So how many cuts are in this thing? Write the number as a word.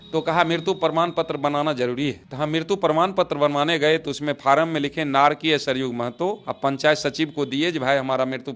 zero